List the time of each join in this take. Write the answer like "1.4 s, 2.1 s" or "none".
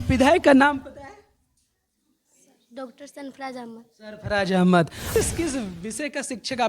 5.2 s